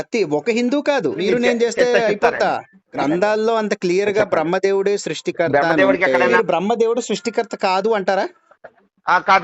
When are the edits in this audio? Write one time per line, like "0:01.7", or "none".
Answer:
0:01.2
0:02.9
0:06.3